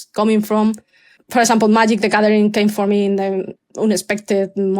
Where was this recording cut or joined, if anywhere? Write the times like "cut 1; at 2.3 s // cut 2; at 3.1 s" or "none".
cut 1; at 1.2 s // cut 2; at 3.6 s